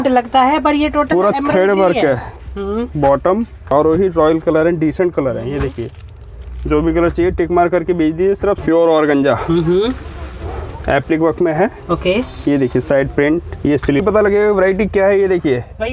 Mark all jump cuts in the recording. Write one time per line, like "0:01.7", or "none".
0:03.7
0:08.6
0:14.0